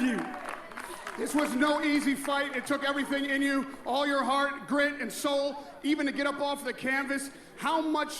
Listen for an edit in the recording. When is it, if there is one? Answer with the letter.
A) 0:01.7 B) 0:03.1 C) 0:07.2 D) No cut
C